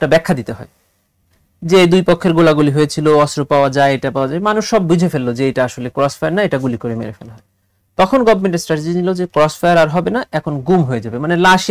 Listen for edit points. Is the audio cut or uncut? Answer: uncut